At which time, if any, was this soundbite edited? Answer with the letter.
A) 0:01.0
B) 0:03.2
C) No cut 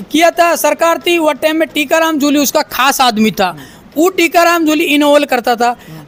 C